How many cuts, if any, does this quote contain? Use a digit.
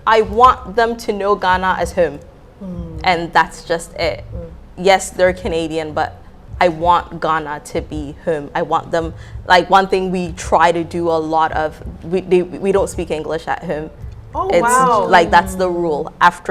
0